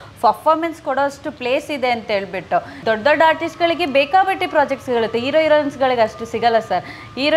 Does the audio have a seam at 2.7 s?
yes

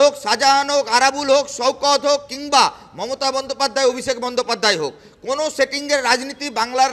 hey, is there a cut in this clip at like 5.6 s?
no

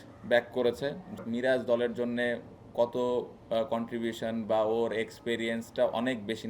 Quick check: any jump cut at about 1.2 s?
yes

